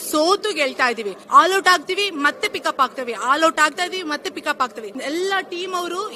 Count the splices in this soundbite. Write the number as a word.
two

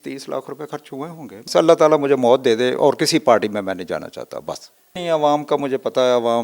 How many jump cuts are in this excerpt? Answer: two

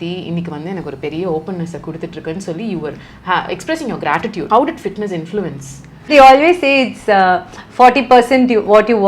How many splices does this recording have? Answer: two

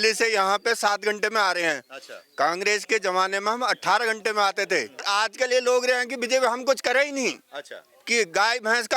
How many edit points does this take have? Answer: one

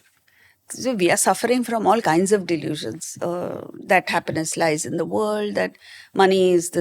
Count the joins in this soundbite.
zero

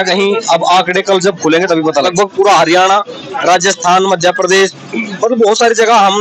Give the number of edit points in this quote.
one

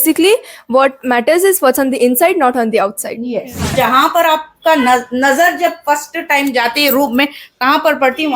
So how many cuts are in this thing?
one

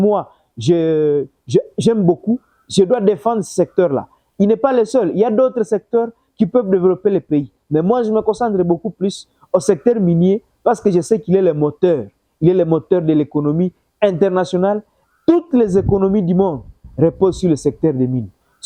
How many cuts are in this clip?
zero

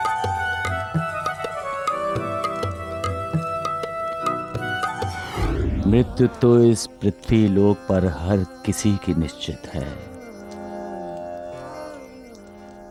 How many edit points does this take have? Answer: zero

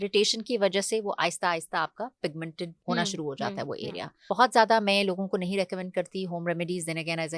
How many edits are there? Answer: two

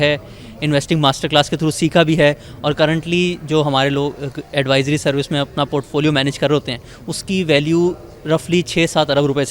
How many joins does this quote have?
zero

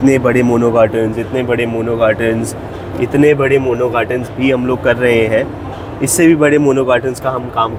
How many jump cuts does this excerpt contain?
zero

